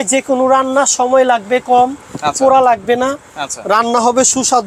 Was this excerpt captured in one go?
yes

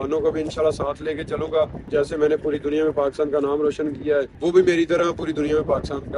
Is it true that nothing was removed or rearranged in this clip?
no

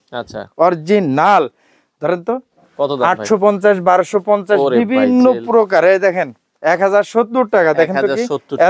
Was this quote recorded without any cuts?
yes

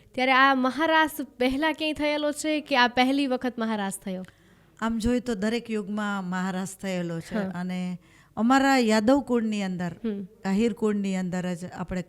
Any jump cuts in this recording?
no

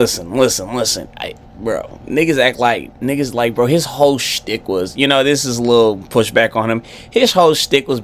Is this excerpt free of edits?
yes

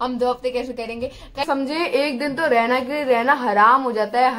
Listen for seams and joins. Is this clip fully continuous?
no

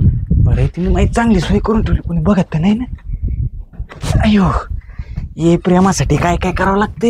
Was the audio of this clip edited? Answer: no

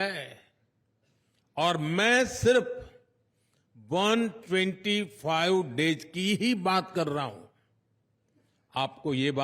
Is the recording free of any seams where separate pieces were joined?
yes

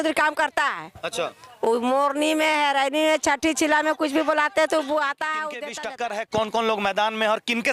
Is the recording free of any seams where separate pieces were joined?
no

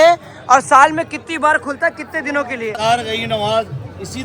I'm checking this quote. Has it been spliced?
yes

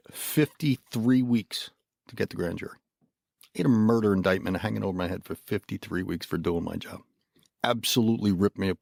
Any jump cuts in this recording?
no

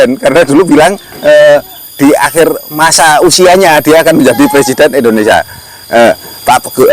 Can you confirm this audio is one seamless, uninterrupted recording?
yes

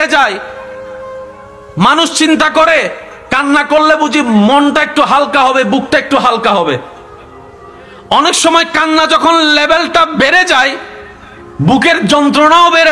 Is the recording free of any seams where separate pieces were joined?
yes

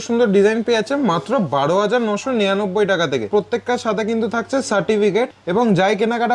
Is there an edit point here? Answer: yes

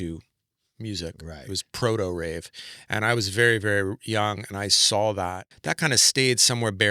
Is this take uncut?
no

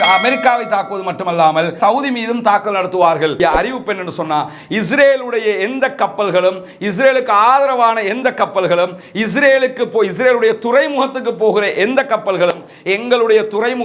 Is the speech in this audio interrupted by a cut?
yes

